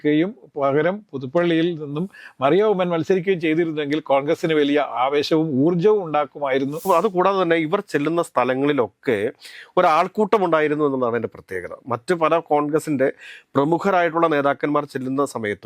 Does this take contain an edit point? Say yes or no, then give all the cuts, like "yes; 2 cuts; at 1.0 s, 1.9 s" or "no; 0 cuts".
yes; 1 cut; at 6.8 s